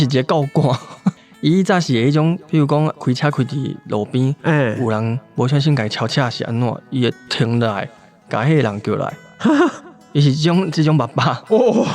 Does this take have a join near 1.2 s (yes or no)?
yes